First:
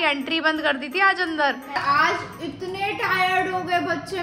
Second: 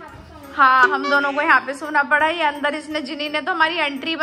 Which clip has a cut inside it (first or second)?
first